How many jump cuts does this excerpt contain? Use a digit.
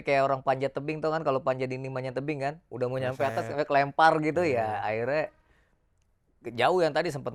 0